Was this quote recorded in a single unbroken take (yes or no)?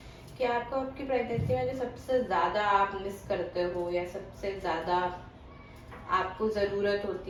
yes